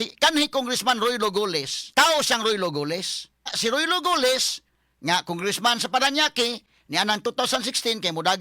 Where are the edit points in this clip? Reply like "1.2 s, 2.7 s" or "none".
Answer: 1.8 s, 3.5 s